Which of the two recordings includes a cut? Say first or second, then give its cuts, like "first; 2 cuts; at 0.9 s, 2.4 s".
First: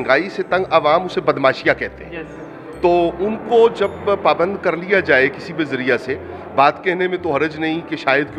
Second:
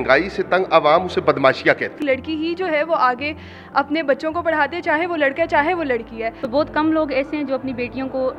second; 2 cuts; at 2.0 s, 6.3 s